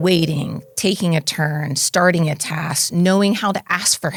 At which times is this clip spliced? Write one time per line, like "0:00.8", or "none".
none